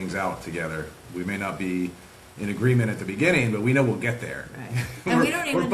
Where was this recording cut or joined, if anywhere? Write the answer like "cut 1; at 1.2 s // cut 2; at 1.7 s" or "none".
none